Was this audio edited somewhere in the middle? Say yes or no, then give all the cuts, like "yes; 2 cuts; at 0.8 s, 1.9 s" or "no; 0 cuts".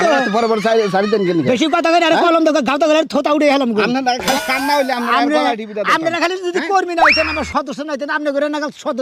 no; 0 cuts